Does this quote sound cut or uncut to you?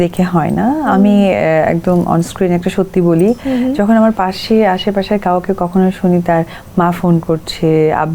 uncut